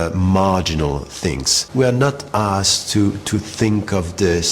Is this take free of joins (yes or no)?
no